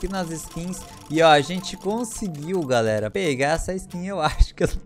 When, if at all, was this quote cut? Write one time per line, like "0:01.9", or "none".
0:03.1